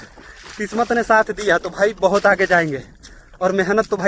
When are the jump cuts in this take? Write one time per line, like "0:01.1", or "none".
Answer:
none